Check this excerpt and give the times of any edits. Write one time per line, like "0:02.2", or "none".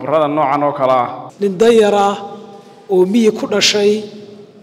0:01.2